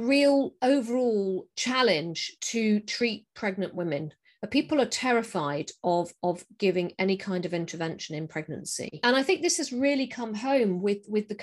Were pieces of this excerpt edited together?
no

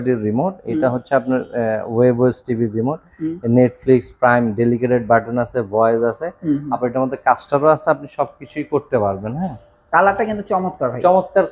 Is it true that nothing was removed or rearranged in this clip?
yes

